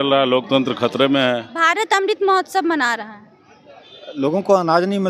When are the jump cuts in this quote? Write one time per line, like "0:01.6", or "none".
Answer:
0:01.5